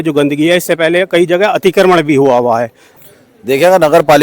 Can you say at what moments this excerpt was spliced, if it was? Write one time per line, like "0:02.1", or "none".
0:02.8